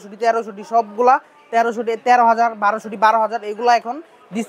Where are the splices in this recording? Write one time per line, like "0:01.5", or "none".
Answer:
none